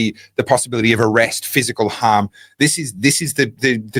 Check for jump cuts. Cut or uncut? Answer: uncut